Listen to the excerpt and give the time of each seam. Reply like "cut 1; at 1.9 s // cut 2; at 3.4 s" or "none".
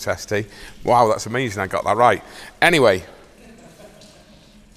none